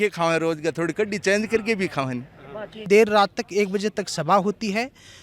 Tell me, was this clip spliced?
yes; 1 cut; at 2.8 s

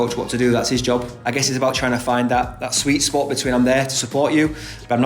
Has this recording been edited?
yes; 1 cut; at 1.1 s

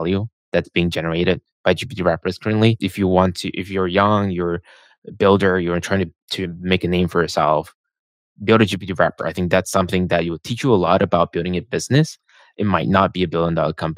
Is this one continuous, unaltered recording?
no; 1 cut; at 2.8 s

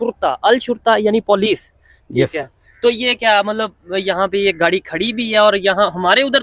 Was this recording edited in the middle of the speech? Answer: no; 0 cuts

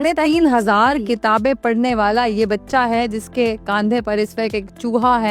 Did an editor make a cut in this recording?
no; 0 cuts

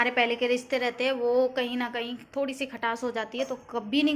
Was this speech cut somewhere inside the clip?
no; 0 cuts

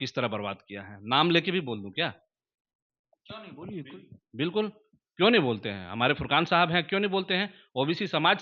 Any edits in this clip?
no; 0 cuts

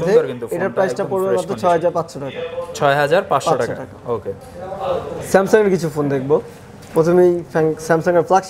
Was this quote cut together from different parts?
no; 0 cuts

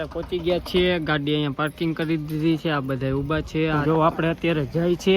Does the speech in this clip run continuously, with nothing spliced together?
no; 1 cut; at 3.8 s

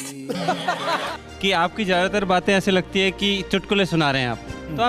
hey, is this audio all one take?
no; 1 cut; at 1.2 s

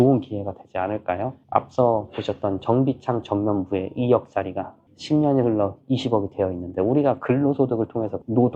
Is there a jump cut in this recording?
no; 0 cuts

